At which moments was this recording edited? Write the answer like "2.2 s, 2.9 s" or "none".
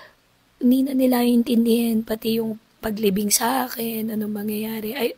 none